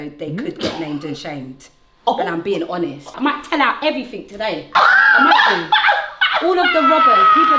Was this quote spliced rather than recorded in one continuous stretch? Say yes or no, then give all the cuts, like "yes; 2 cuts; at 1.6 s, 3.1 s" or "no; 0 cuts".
yes; 1 cut; at 3.1 s